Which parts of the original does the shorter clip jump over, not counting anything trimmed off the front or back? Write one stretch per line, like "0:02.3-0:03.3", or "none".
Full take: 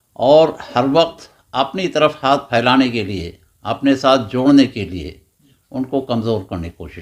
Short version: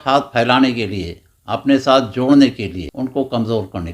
0:05.0-0:05.6